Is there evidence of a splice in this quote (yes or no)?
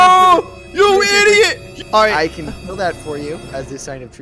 yes